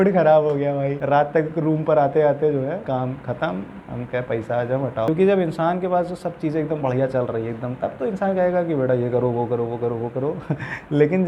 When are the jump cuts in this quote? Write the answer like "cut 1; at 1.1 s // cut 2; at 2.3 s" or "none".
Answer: cut 1; at 5.1 s